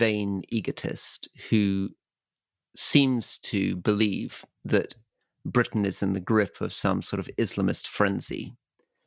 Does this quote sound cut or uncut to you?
uncut